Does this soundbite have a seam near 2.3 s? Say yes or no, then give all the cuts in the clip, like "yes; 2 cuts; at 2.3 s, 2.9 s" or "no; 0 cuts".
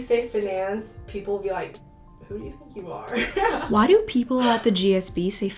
no; 0 cuts